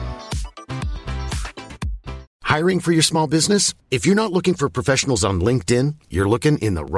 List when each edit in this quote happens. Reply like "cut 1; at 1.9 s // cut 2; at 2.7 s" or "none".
cut 1; at 2.3 s